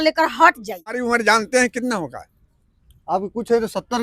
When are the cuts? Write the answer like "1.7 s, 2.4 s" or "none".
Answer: 1.0 s